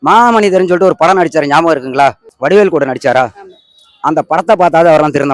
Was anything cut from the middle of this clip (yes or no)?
yes